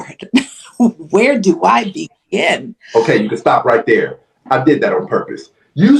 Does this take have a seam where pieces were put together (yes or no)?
no